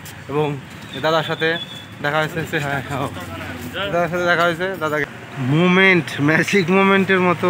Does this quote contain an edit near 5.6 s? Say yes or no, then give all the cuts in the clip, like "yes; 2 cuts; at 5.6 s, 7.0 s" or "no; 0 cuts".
yes; 1 cut; at 5.6 s